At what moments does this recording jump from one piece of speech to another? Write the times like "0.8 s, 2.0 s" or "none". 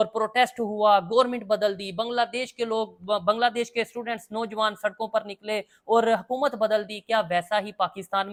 none